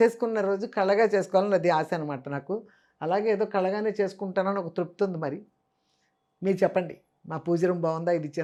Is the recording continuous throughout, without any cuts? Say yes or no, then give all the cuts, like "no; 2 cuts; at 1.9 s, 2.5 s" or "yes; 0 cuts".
yes; 0 cuts